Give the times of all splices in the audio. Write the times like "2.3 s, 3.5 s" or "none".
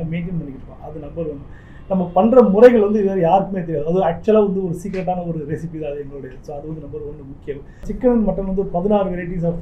7.9 s